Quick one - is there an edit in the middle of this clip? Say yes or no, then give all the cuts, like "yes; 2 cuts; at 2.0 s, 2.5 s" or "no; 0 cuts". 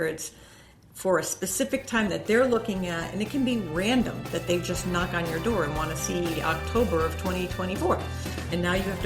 no; 0 cuts